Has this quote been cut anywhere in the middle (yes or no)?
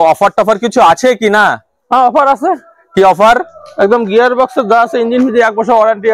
no